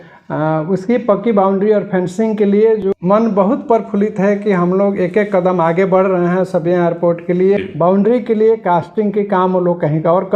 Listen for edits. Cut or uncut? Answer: cut